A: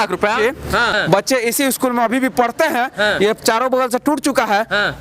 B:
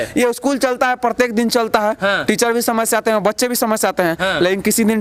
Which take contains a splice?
A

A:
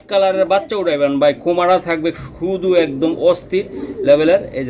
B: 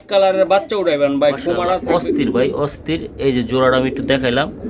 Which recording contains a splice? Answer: B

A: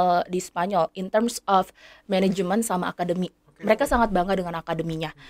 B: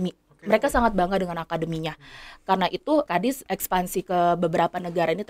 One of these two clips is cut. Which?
B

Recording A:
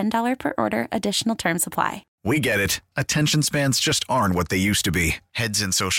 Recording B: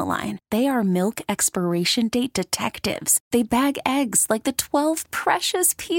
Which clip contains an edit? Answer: A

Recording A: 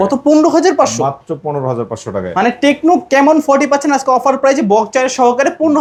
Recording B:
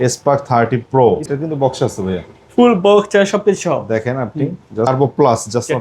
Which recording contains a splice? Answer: B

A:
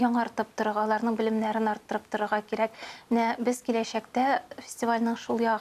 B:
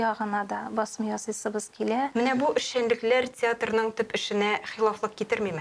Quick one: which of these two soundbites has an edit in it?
B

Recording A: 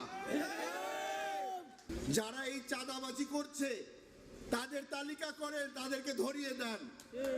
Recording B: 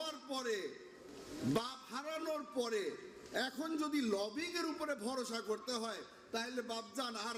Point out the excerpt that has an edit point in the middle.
A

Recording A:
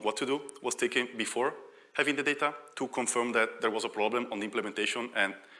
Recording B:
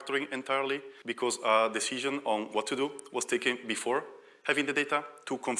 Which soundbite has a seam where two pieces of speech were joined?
B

